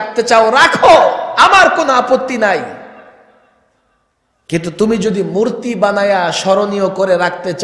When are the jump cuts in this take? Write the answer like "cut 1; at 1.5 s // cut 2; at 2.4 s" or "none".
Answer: none